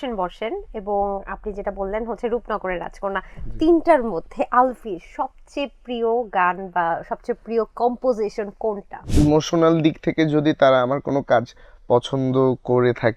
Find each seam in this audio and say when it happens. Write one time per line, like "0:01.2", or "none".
0:09.0